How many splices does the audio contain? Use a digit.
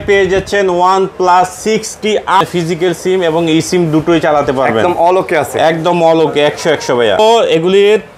2